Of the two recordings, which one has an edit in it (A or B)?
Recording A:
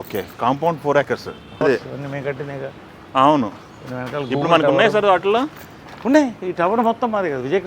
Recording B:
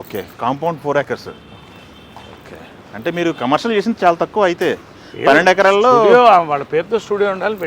A